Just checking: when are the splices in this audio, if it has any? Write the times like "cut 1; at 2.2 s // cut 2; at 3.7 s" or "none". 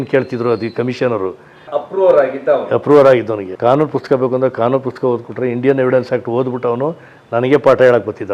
cut 1; at 1.6 s // cut 2; at 3.5 s